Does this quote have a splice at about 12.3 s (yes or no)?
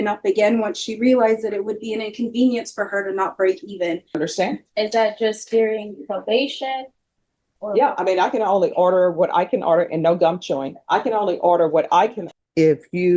yes